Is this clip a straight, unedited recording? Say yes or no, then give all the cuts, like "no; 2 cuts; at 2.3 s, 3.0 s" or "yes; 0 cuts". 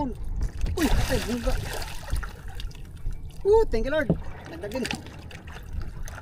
yes; 0 cuts